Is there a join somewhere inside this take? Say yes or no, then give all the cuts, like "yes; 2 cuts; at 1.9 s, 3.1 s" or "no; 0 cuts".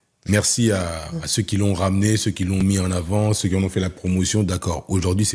no; 0 cuts